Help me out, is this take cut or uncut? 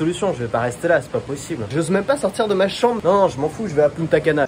cut